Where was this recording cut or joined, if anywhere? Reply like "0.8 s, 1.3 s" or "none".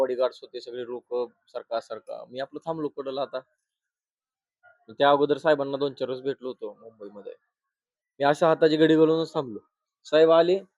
none